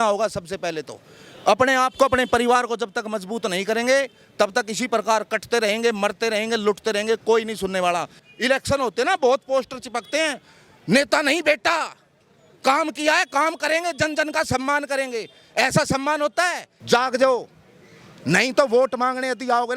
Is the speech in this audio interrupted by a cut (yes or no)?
yes